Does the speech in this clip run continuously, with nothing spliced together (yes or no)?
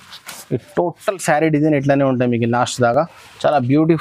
yes